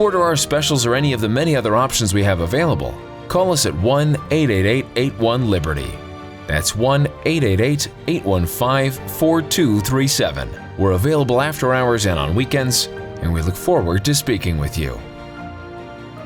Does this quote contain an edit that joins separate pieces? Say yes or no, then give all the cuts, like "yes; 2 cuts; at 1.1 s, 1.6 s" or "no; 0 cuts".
no; 0 cuts